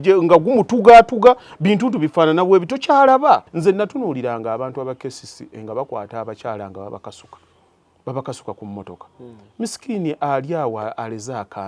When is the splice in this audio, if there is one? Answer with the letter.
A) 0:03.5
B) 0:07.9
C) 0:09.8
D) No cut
A